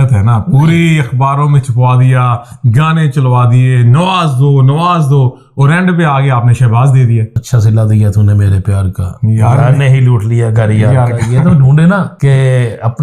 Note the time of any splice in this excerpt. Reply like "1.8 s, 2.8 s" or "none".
7.4 s, 12.1 s

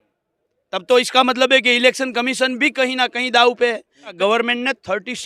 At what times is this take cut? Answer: 4.1 s

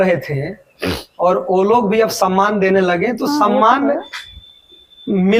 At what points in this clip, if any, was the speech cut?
none

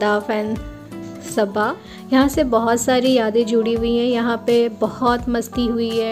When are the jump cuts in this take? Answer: 1.9 s

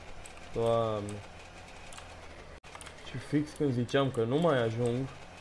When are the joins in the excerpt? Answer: 2.6 s

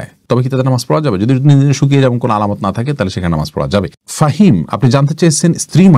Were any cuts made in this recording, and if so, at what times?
none

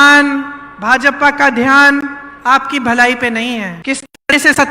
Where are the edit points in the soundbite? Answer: 3.7 s

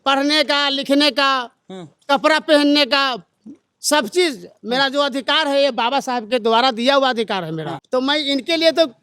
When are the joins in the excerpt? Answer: 7.8 s

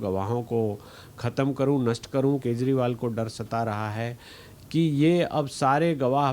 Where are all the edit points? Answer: 2.4 s

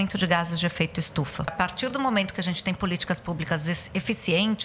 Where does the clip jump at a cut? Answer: 1.5 s

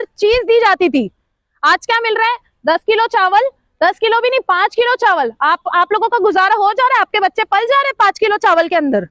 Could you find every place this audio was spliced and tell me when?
none

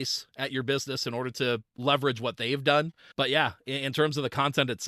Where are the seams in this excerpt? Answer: 1.7 s, 3.0 s

